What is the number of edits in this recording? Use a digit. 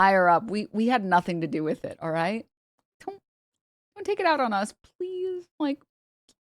0